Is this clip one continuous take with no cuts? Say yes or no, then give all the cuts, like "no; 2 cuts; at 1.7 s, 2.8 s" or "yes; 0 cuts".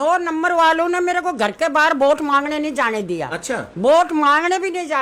yes; 0 cuts